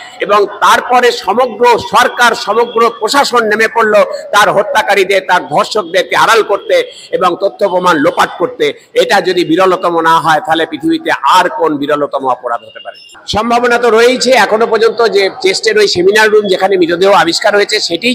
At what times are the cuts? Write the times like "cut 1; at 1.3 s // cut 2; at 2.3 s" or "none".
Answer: cut 1; at 13.1 s